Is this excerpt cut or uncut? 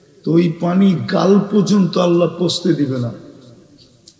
uncut